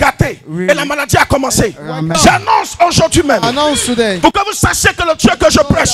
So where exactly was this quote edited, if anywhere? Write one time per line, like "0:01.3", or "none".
0:02.2